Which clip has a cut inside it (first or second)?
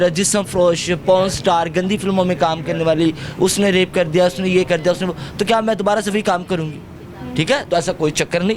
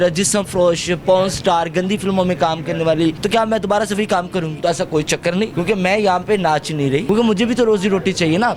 second